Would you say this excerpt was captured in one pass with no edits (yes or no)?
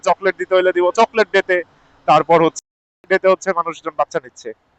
no